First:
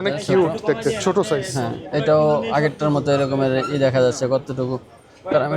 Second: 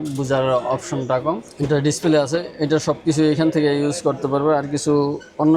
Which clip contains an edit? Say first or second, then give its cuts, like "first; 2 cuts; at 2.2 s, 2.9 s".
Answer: second; 1 cut; at 1.5 s